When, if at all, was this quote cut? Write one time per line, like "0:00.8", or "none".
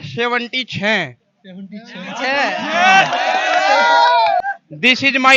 0:04.4